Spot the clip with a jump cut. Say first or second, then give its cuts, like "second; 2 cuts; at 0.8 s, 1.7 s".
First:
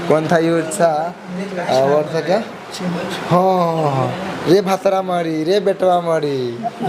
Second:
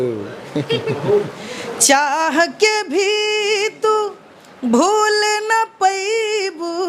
second; 1 cut; at 1.4 s